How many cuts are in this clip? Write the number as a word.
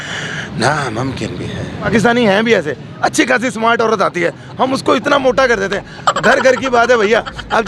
one